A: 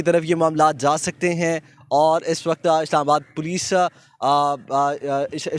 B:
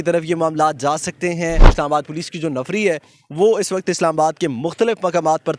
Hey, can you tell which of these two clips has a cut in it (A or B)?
B